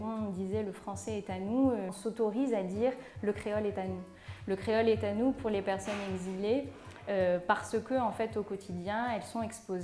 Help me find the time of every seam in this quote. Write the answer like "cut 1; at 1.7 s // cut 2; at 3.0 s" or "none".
cut 1; at 1.9 s